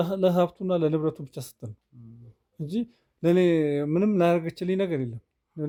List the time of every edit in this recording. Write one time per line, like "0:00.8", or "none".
none